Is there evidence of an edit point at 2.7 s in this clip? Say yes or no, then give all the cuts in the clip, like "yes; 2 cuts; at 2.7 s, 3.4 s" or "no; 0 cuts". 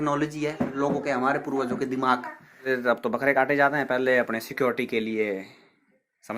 yes; 1 cut; at 2.7 s